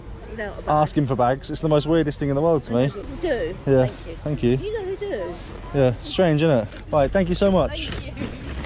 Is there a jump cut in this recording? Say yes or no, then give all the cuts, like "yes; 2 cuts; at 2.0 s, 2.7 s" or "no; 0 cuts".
no; 0 cuts